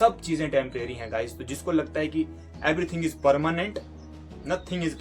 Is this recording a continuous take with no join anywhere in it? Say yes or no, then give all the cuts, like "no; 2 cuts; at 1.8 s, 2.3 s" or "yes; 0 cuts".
yes; 0 cuts